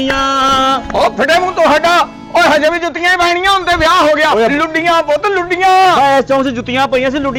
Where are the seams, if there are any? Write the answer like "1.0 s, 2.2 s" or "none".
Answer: none